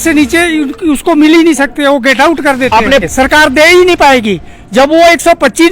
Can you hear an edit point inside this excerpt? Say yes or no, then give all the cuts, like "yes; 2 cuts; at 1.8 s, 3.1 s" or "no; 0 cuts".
yes; 1 cut; at 3.0 s